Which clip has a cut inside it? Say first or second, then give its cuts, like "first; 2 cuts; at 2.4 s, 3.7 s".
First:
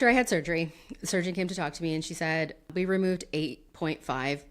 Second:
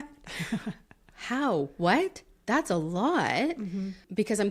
first; 1 cut; at 2.7 s